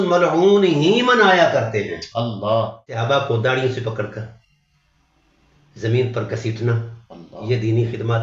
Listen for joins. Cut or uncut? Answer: cut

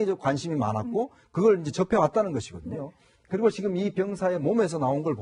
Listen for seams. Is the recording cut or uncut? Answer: cut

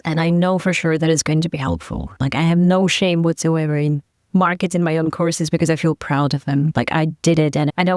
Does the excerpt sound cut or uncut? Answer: uncut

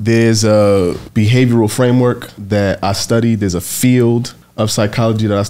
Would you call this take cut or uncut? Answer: cut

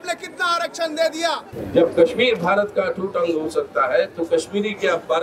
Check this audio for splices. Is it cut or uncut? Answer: cut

